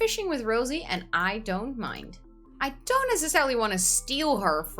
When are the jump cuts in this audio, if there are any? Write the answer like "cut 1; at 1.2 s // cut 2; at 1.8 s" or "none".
cut 1; at 2.5 s